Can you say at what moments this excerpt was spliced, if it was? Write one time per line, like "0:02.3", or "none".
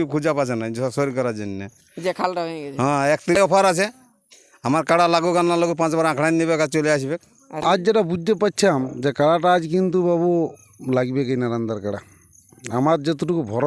0:03.4
0:07.6